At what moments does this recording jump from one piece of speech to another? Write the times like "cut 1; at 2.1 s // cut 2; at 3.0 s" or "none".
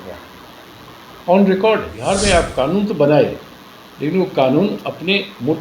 cut 1; at 1.9 s